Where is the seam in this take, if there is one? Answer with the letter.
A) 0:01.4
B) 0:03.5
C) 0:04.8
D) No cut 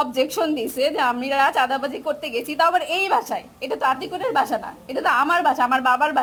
D